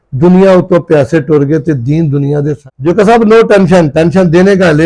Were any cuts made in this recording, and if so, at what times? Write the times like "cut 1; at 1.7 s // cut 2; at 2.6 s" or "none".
cut 1; at 2.8 s